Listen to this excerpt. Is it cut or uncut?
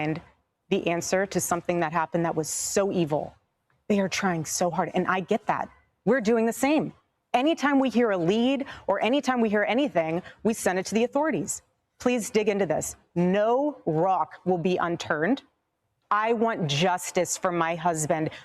uncut